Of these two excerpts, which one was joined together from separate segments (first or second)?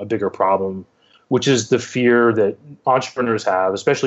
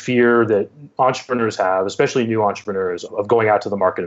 second